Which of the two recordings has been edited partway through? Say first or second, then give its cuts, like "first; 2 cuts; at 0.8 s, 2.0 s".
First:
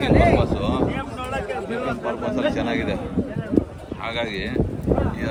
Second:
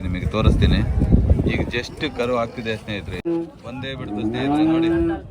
second; 1 cut; at 3.2 s